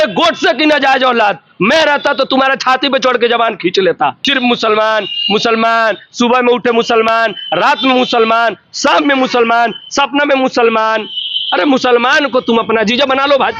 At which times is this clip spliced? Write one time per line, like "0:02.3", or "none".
0:04.2